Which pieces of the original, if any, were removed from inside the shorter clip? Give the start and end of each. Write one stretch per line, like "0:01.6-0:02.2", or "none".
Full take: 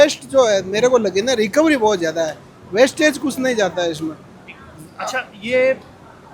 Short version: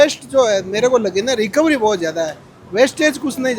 none